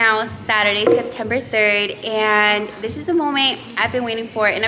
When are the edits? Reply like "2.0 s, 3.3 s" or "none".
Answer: none